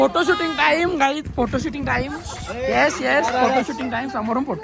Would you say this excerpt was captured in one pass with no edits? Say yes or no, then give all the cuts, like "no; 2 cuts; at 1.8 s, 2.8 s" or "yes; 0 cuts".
yes; 0 cuts